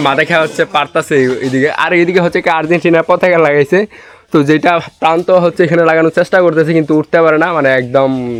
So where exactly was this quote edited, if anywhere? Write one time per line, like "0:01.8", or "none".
none